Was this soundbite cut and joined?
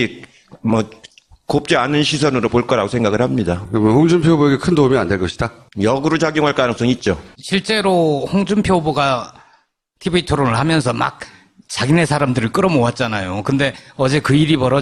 no; 0 cuts

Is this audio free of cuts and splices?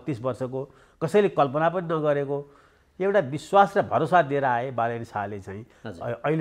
yes; 0 cuts

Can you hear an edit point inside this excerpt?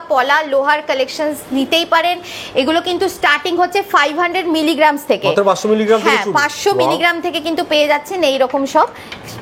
no; 0 cuts

